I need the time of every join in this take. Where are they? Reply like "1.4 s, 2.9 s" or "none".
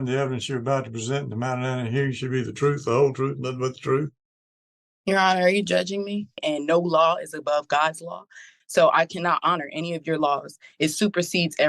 6.4 s

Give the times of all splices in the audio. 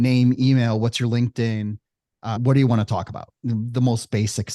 2.4 s, 3.4 s

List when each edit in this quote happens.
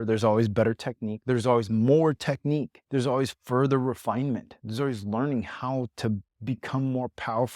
2.8 s, 4.6 s

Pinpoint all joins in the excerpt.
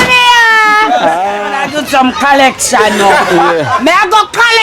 1.7 s

